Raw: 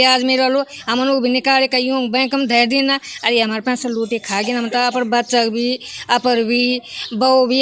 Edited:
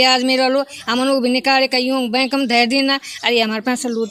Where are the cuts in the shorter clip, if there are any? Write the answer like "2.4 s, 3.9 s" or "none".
none

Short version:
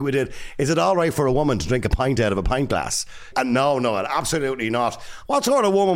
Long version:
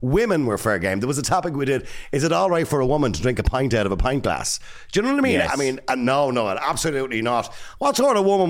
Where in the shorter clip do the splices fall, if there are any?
3.3 s

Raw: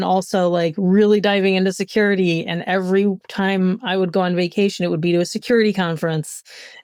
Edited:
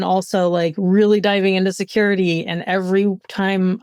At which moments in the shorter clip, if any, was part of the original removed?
none

